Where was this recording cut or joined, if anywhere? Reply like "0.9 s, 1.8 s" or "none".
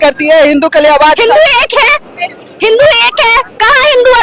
none